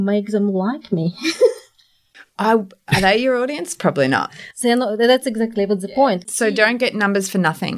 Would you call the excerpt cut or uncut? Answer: cut